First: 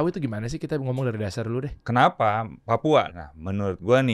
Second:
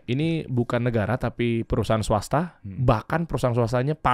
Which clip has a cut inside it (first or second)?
first